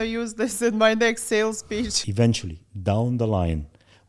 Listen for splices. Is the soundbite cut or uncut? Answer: cut